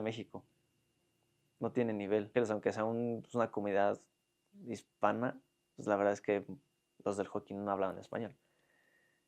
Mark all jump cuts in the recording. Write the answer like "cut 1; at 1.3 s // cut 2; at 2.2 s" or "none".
cut 1; at 2.3 s